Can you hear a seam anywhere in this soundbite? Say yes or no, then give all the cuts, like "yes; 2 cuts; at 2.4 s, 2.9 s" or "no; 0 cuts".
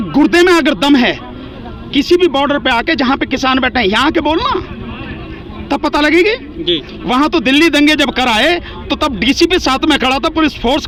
no; 0 cuts